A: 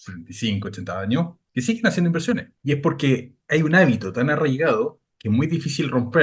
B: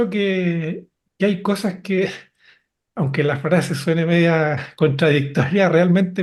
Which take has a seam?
A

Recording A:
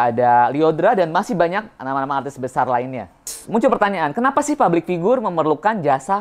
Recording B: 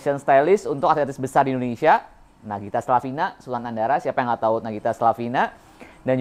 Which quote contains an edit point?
A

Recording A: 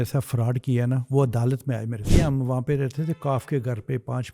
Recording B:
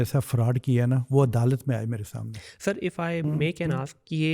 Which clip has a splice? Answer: A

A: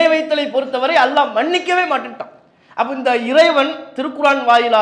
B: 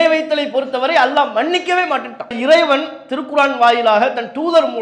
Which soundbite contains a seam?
B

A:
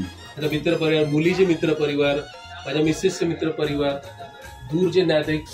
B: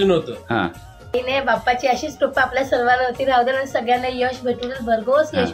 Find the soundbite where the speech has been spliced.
B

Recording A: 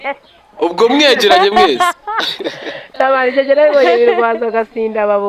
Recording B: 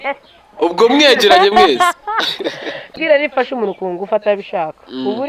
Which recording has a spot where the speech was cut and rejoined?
B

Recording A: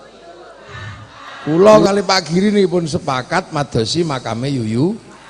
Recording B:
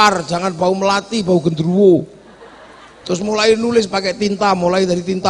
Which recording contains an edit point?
A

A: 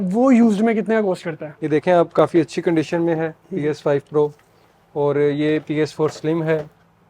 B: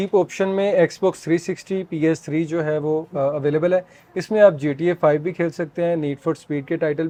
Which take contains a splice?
A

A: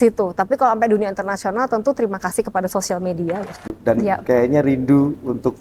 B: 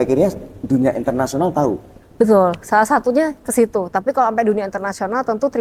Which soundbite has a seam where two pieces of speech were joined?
A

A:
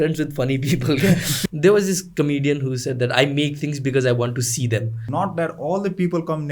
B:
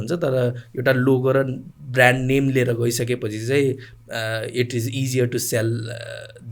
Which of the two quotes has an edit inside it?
A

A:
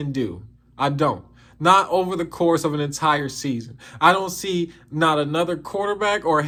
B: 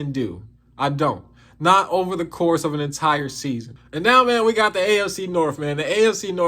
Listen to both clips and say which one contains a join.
B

